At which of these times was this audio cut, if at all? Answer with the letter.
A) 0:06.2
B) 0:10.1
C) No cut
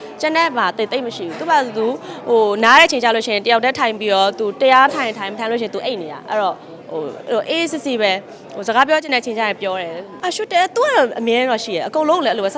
B